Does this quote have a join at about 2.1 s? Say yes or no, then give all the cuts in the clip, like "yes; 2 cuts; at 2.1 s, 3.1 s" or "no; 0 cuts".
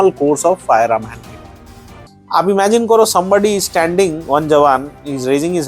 yes; 1 cut; at 2.1 s